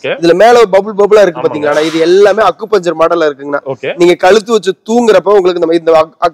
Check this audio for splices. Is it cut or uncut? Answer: uncut